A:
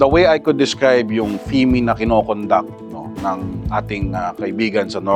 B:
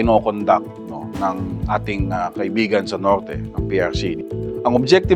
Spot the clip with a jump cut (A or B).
B